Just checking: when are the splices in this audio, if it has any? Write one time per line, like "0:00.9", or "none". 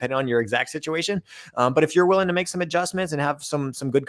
none